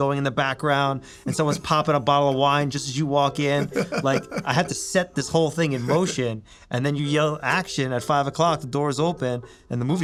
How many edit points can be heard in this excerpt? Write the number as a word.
zero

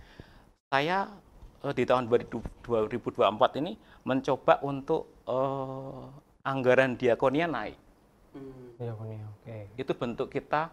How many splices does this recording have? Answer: zero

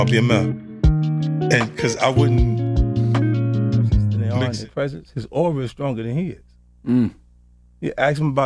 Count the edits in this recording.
one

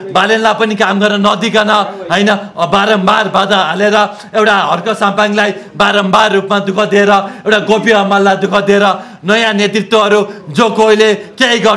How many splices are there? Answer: zero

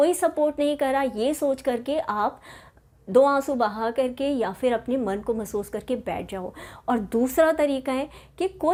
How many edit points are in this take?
zero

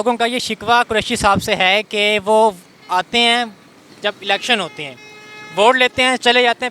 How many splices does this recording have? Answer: zero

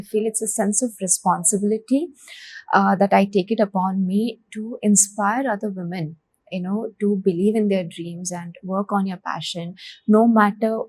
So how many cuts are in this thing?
zero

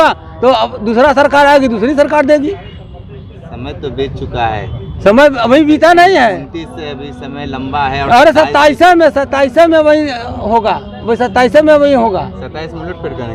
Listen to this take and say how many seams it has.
zero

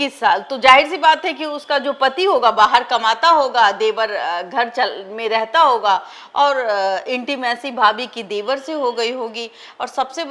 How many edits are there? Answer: zero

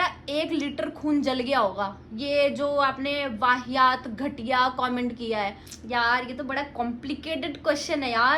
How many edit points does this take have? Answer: one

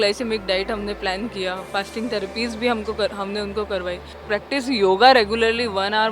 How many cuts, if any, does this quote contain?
one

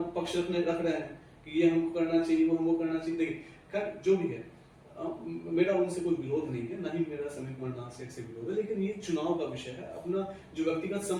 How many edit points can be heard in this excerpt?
zero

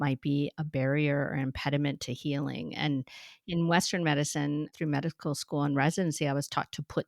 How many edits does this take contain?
one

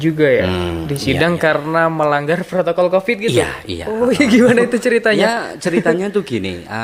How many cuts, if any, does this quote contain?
zero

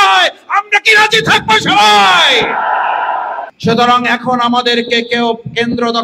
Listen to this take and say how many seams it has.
one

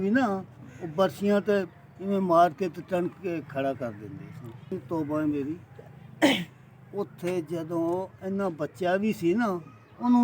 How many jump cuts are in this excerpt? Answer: one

